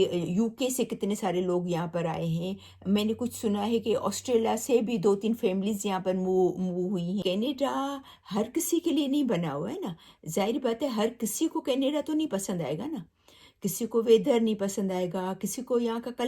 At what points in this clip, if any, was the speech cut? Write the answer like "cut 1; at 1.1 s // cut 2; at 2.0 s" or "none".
cut 1; at 7.2 s